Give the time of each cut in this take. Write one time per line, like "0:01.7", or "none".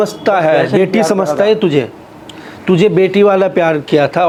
none